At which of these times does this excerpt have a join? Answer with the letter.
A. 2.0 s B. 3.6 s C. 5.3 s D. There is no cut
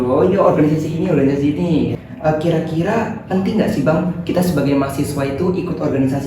A